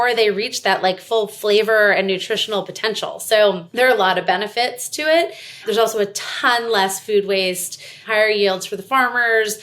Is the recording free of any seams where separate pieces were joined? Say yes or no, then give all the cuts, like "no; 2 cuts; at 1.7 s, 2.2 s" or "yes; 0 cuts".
no; 3 cuts; at 3.6 s, 5.6 s, 8.0 s